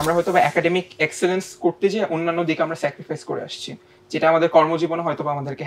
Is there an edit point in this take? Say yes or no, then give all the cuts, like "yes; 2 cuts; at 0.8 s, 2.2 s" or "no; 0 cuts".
no; 0 cuts